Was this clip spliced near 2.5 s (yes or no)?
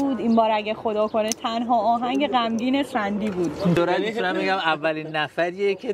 no